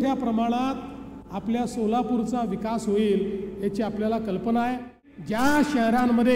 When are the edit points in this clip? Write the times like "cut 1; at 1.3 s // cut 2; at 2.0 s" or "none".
cut 1; at 5.0 s